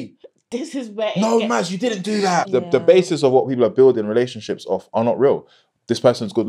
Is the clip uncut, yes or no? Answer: no